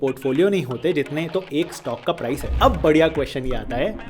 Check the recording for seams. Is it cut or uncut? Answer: cut